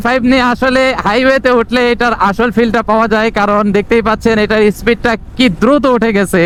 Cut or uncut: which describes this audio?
uncut